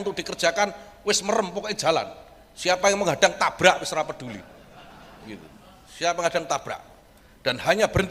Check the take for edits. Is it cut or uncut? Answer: uncut